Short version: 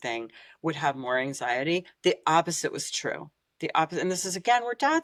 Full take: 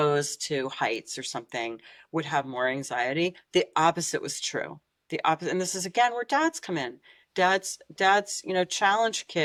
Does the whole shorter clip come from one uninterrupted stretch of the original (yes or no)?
yes